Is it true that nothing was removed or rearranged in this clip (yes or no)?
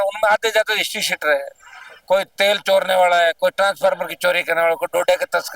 yes